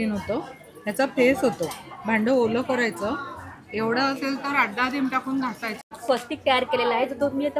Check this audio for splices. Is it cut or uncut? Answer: cut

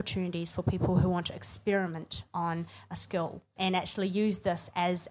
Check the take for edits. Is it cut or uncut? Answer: cut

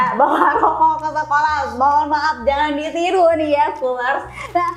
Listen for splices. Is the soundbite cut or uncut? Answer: uncut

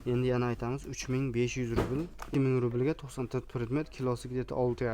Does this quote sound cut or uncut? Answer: cut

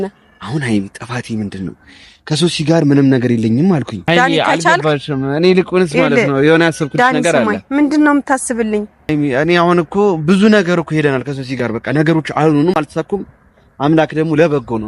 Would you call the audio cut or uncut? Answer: cut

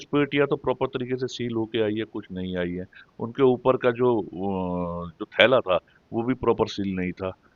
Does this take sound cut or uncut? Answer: uncut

